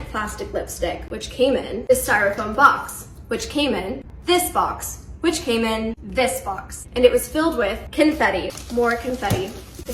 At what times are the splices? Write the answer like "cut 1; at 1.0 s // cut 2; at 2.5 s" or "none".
cut 1; at 7.8 s

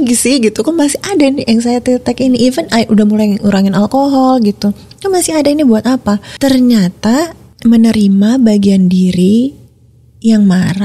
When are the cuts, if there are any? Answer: cut 1; at 6.3 s // cut 2; at 7.4 s

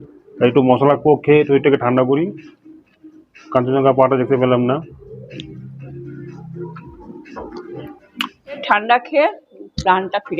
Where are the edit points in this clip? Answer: cut 1; at 8.6 s

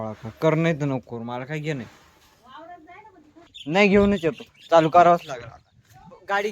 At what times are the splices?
cut 1; at 3.5 s

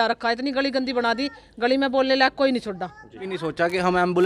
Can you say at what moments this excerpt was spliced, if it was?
cut 1; at 3.3 s

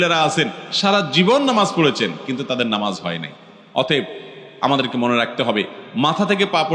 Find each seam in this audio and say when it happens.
none

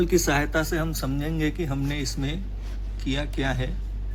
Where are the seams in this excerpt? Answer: none

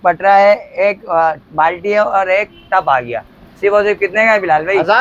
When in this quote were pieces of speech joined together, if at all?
none

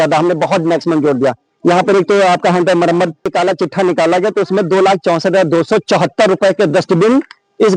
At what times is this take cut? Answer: cut 1; at 3.3 s

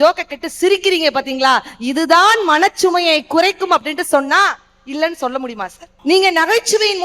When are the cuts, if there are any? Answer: cut 1; at 5.9 s

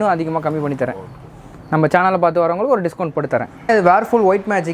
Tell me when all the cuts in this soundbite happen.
cut 1; at 3.7 s

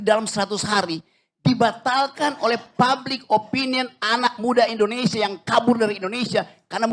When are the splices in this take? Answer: none

